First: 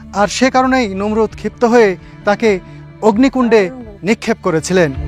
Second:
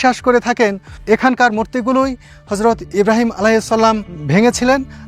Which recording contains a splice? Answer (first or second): second